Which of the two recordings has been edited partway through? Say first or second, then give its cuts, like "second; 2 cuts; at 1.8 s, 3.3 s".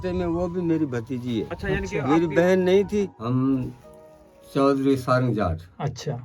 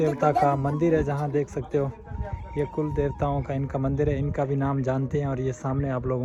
first; 1 cut; at 3.2 s